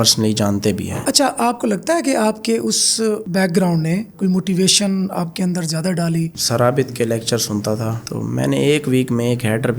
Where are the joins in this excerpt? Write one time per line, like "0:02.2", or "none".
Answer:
0:01.0
0:06.4